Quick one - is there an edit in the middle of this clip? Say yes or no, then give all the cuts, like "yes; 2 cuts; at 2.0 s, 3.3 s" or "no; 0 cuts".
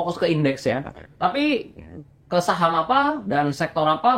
no; 0 cuts